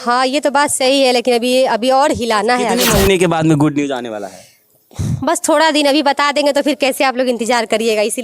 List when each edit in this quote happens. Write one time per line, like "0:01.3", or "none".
0:02.8